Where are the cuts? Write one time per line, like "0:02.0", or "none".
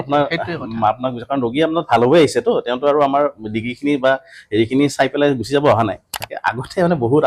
0:06.3